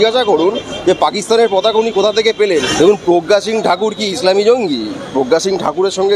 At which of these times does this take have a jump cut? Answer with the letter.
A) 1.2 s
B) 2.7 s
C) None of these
B